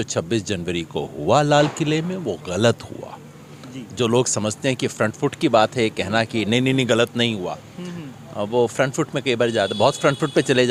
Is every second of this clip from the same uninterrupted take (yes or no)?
yes